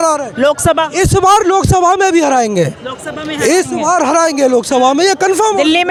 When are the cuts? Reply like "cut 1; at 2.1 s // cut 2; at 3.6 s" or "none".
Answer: none